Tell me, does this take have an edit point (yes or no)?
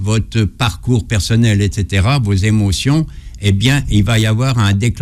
no